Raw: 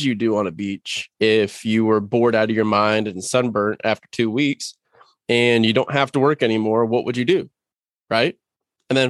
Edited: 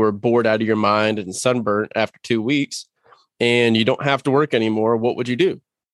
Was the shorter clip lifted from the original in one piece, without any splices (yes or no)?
yes